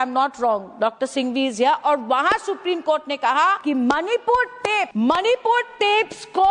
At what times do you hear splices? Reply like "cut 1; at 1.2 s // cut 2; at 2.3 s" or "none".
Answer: cut 1; at 3.6 s // cut 2; at 4.9 s